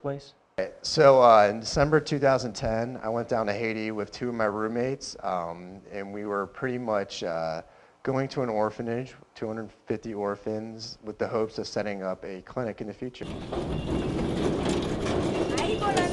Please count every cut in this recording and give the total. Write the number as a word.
one